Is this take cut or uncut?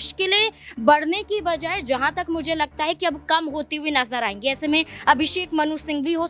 uncut